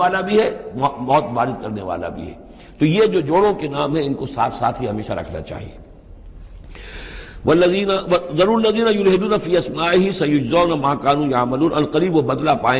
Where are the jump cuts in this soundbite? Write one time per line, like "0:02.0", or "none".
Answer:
none